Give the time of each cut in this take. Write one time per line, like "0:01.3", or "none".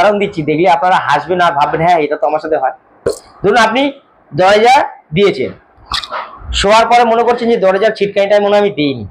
none